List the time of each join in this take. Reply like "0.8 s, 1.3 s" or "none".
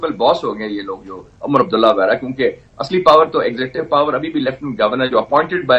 none